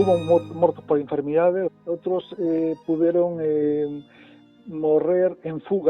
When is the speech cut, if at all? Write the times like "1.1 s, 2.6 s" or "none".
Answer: 1.8 s

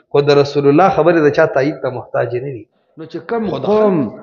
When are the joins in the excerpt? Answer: 3.2 s

